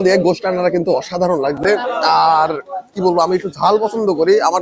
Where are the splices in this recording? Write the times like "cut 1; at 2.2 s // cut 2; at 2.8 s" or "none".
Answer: none